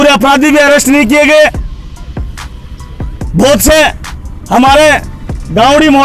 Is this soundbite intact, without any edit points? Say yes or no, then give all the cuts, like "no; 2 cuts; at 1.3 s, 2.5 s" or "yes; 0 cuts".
yes; 0 cuts